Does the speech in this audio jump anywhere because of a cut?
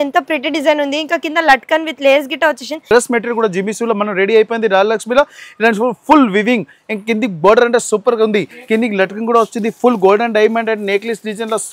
yes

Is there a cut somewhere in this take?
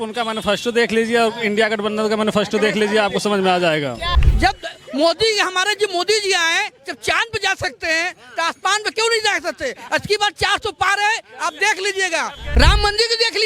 yes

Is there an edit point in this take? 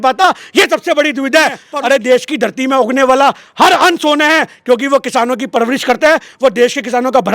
yes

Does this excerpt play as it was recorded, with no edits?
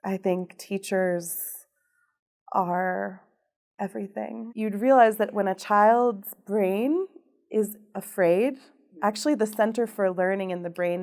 no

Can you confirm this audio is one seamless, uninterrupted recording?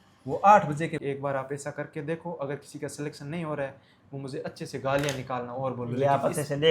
no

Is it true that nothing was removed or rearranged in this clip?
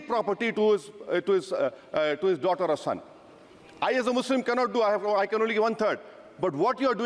yes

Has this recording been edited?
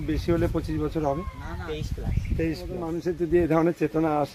yes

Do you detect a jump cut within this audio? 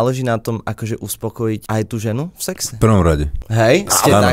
yes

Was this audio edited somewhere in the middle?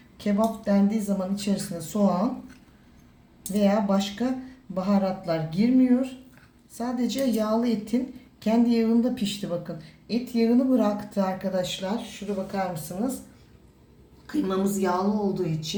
no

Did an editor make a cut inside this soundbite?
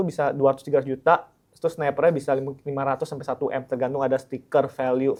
no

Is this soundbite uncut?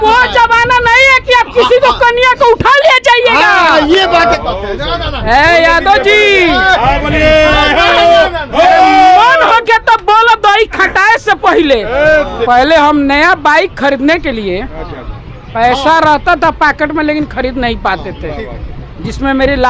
no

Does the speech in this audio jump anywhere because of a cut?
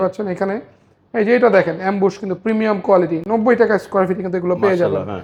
no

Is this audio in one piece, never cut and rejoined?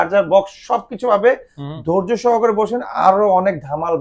yes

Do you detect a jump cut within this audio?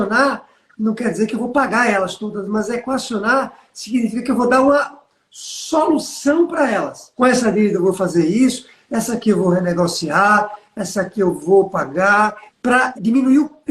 yes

